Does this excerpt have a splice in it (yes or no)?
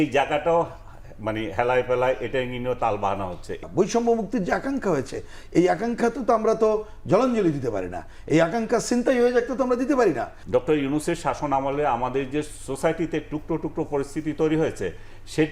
yes